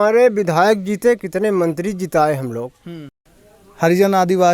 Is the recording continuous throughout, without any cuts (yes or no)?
no